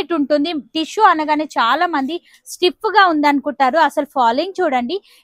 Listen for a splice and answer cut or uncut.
uncut